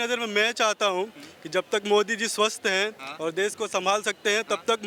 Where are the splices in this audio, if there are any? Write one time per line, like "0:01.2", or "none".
none